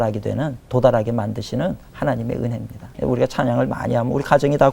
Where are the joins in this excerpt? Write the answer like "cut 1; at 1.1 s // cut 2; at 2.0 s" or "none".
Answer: cut 1; at 2.9 s